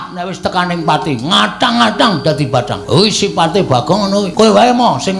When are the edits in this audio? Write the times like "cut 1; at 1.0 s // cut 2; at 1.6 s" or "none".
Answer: cut 1; at 2.8 s // cut 2; at 4.3 s